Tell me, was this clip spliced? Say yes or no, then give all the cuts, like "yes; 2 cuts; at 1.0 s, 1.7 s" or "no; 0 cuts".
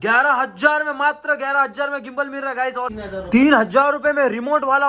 yes; 1 cut; at 2.9 s